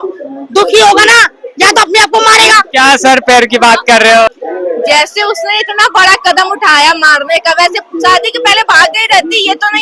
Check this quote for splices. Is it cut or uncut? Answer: cut